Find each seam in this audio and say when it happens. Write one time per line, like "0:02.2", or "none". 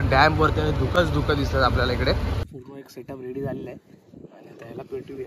0:02.5